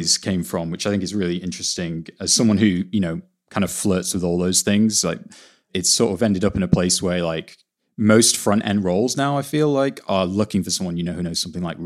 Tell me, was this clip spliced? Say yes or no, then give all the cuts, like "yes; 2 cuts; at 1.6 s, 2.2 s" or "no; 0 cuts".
no; 0 cuts